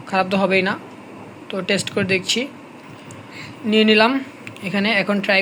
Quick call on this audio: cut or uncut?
uncut